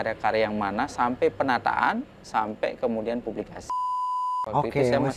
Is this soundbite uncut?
no; 1 cut; at 4.1 s

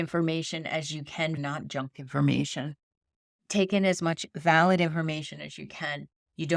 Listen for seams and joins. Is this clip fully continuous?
no; 1 cut; at 1.4 s

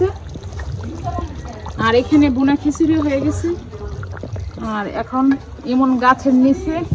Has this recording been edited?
no; 0 cuts

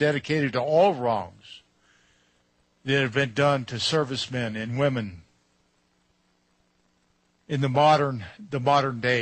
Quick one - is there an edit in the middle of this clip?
no; 0 cuts

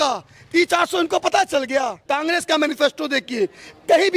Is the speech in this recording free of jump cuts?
no; 1 cut; at 2.0 s

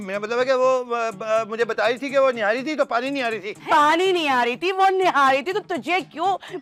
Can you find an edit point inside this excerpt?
no; 0 cuts

